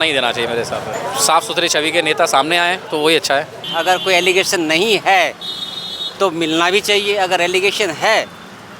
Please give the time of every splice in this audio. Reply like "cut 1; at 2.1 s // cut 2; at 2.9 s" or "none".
cut 1; at 1.0 s // cut 2; at 2.8 s // cut 3; at 3.6 s